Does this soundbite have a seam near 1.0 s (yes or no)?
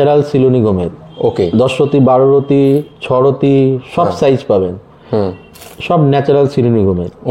no